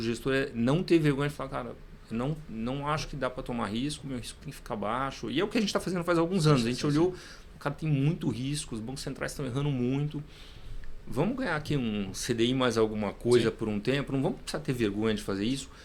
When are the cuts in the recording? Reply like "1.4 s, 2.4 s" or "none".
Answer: none